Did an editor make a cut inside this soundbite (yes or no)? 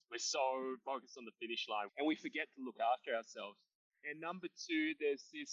yes